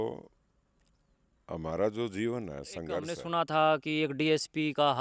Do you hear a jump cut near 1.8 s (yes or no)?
no